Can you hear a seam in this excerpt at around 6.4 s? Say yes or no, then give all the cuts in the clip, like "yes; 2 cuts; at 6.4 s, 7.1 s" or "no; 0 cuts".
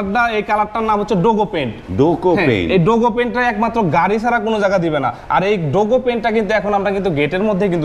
no; 0 cuts